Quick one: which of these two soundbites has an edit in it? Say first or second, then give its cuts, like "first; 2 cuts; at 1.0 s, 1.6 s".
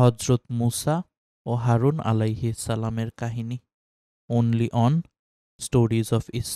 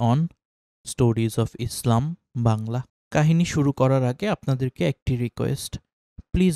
second; 1 cut; at 2.9 s